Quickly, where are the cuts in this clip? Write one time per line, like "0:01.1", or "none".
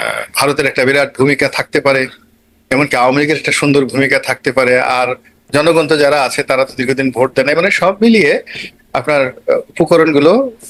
none